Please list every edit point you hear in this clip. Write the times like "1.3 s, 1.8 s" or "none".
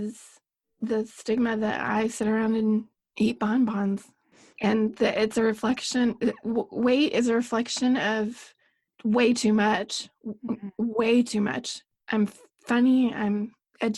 3.0 s

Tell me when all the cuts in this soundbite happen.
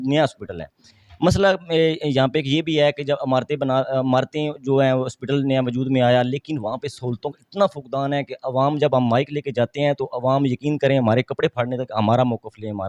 none

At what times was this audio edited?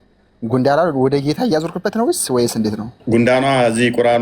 2.9 s

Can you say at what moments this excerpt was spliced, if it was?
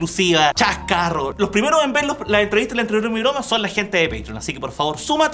1.2 s

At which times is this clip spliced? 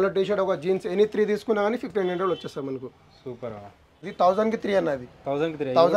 4.1 s

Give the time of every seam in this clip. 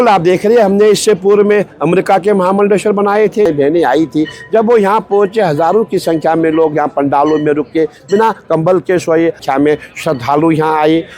3.5 s, 9.4 s

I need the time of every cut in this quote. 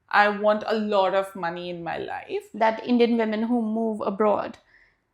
2.4 s

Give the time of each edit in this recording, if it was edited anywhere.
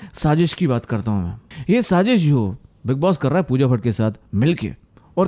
none

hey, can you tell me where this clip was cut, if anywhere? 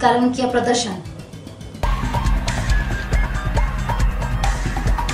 1.7 s

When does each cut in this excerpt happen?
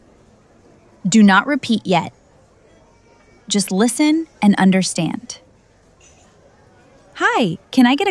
5.4 s, 6.8 s

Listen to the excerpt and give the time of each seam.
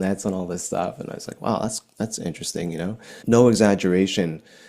3.1 s

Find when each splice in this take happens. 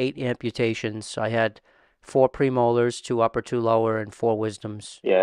none

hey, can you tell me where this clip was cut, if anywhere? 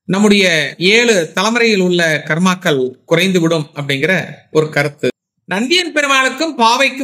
5.1 s

